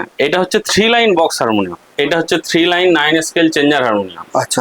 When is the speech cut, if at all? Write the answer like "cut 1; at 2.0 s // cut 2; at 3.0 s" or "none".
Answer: cut 1; at 1.8 s